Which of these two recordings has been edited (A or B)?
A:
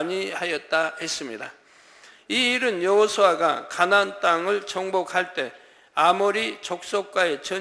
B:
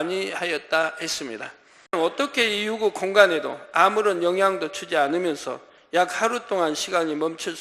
B